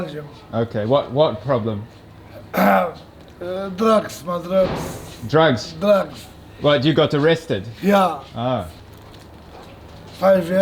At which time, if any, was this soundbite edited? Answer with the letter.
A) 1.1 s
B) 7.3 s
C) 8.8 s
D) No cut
C